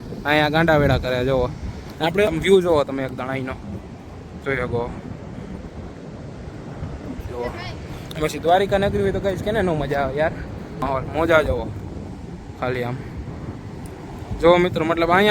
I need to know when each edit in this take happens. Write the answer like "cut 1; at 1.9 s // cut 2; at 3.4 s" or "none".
cut 1; at 2.3 s // cut 2; at 10.8 s